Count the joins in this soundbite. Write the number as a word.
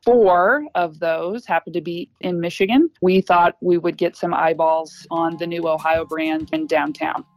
three